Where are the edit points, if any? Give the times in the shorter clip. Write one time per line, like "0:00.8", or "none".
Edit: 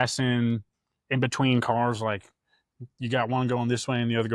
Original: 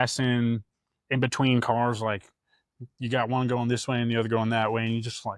none